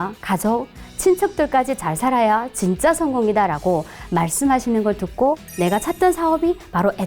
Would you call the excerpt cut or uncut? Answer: cut